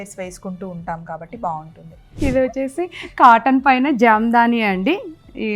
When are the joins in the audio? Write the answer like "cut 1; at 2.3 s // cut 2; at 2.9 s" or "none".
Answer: cut 1; at 2.2 s